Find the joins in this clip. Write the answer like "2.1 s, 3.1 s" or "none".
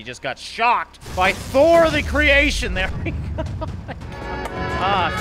none